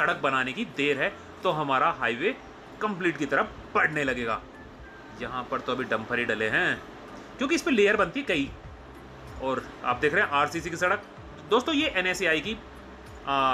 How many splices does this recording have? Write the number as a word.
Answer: zero